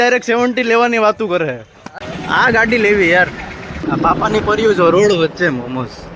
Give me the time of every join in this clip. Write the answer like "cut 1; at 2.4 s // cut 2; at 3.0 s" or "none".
cut 1; at 2.1 s // cut 2; at 3.7 s